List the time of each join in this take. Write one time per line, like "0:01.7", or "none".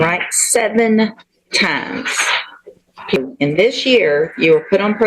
0:03.2